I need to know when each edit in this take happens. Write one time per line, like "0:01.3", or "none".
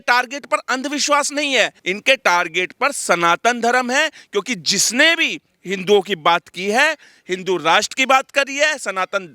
0:01.8